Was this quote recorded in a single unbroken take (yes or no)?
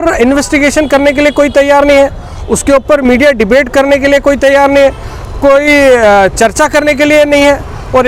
yes